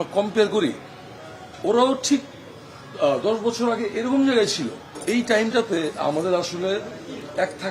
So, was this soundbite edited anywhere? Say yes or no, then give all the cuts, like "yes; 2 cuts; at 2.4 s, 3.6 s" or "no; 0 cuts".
yes; 1 cut; at 5.0 s